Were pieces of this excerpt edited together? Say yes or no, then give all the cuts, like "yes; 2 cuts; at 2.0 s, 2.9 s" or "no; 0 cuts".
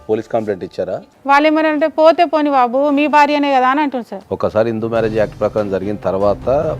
yes; 2 cuts; at 0.9 s, 4.2 s